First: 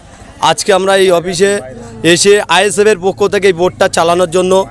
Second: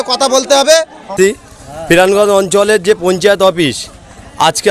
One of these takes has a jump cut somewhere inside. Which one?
second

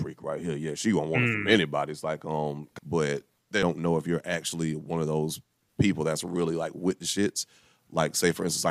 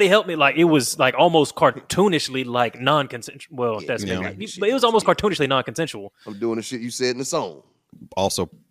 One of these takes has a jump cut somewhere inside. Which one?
first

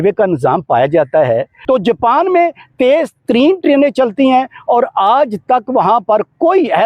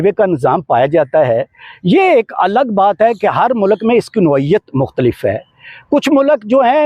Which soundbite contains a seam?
first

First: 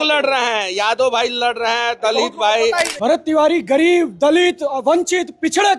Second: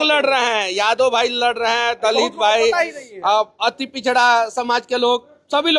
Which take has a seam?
first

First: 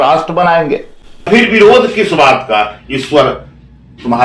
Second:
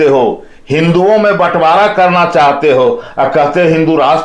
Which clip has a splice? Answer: first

